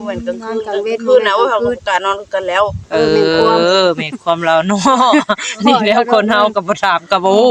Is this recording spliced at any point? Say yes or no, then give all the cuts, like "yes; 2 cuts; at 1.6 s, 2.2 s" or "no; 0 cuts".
no; 0 cuts